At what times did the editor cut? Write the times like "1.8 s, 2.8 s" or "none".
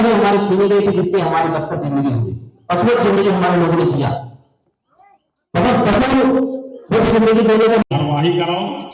7.9 s